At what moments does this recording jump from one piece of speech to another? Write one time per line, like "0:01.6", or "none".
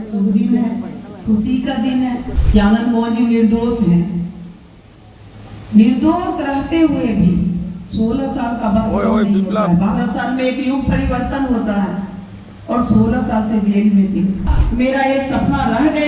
0:02.4
0:14.5